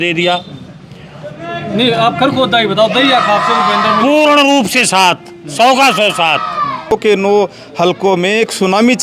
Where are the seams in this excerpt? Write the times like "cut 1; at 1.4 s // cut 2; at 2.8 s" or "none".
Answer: cut 1; at 6.9 s